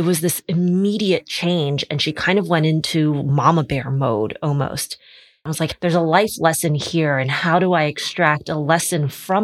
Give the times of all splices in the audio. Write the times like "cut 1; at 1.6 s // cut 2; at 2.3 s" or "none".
cut 1; at 5.5 s